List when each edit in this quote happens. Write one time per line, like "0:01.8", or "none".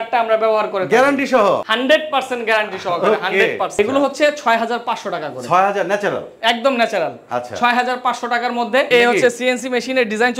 0:01.7
0:03.7
0:08.9